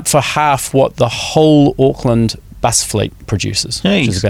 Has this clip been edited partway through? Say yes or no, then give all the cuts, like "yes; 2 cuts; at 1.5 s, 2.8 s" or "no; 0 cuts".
no; 0 cuts